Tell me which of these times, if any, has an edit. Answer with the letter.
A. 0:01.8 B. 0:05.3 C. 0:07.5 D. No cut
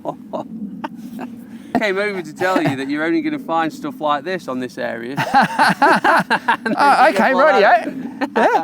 A